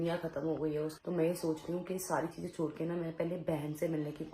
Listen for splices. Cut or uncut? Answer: cut